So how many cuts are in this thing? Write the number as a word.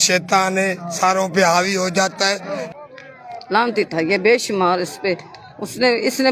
one